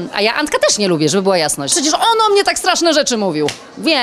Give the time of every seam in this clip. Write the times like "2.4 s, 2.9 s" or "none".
1.7 s